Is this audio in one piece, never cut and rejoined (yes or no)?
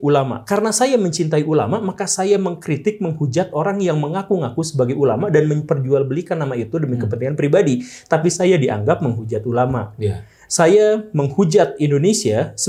yes